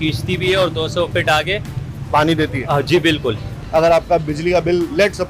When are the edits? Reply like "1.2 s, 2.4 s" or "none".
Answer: 3.5 s